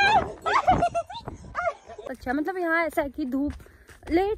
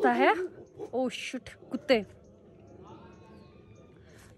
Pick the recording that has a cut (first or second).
first